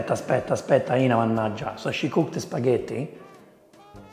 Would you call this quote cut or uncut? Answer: uncut